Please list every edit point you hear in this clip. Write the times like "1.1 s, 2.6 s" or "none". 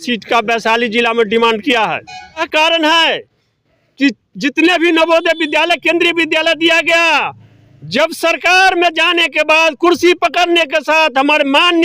2.5 s